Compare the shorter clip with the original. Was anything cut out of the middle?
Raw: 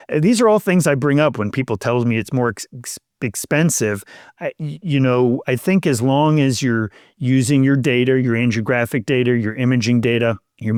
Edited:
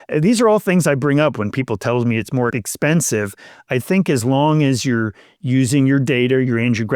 yes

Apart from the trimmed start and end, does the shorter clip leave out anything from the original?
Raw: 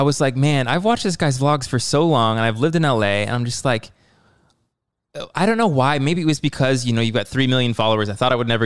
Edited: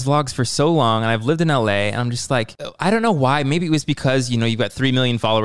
yes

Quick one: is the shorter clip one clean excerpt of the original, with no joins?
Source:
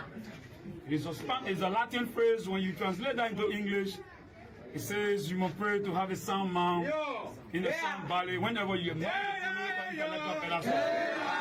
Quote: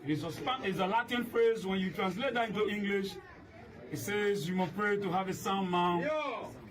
yes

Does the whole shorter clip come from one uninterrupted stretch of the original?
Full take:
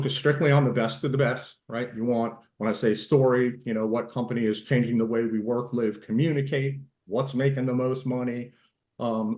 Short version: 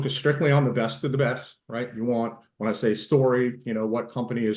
yes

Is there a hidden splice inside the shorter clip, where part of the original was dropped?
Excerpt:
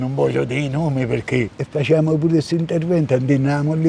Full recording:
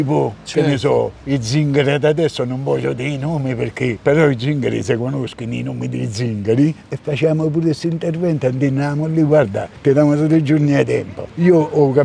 yes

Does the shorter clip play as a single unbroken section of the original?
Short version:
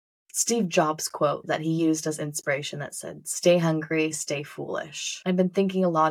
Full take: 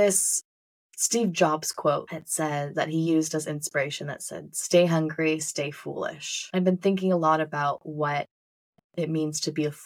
no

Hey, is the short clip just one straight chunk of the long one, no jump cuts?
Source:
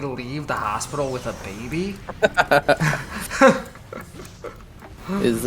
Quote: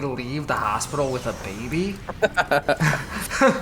yes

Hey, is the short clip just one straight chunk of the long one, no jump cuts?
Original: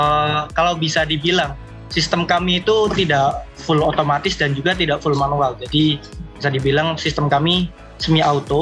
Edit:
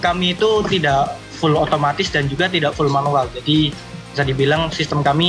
yes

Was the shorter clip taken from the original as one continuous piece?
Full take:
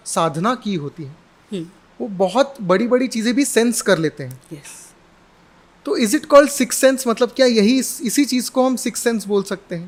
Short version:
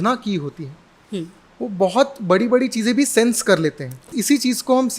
no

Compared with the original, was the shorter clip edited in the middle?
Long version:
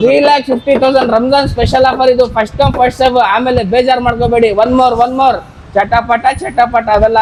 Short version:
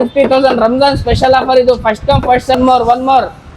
yes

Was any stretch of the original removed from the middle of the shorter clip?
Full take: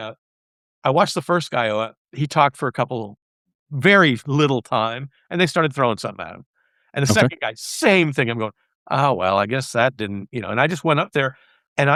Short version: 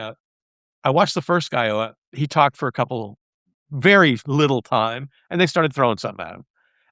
no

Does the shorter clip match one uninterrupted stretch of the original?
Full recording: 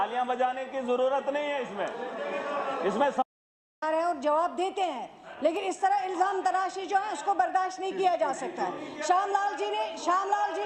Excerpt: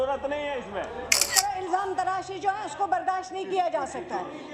no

